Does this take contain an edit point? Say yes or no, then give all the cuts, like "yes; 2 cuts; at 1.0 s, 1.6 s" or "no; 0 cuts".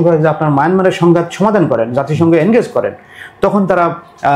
no; 0 cuts